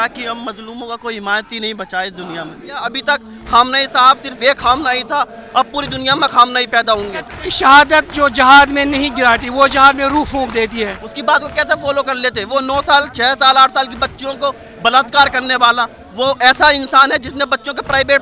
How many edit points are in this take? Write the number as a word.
four